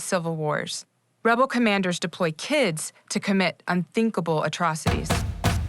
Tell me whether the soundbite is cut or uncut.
cut